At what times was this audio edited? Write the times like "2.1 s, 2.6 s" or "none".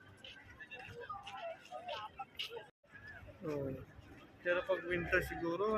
2.9 s

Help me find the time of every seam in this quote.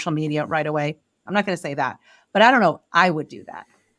1.2 s

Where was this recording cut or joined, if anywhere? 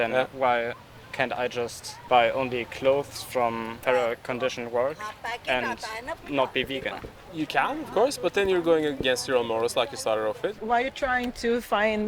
1.9 s, 3.8 s, 7.2 s, 10.6 s

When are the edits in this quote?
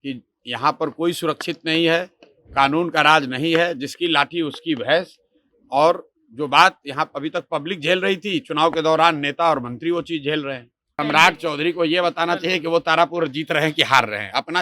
11.0 s

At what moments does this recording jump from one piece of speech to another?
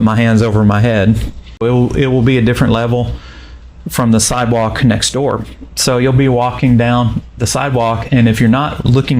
1.6 s

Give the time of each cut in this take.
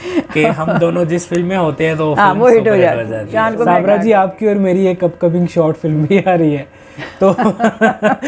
3.6 s

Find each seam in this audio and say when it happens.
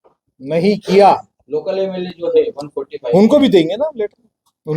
1.6 s

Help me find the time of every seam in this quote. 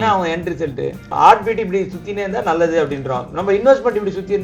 1.1 s

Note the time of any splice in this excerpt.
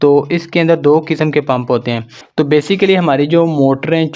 2.1 s

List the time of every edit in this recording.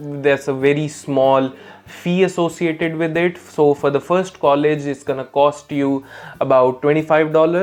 none

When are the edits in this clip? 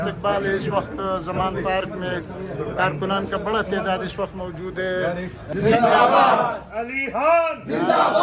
5.5 s

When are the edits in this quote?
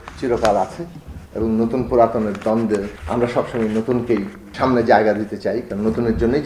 2.9 s, 4.4 s

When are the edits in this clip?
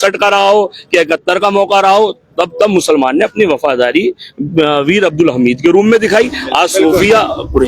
none

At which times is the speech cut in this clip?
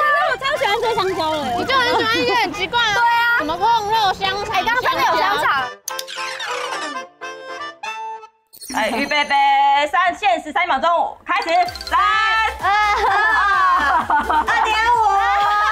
none

